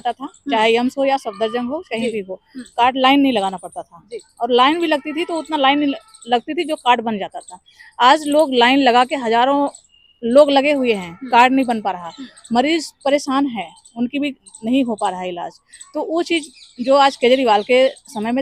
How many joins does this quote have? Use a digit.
0